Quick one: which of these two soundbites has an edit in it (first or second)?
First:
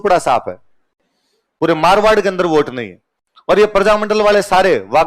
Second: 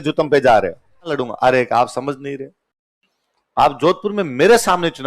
second